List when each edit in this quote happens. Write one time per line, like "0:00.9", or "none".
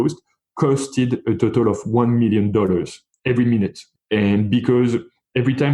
0:03.9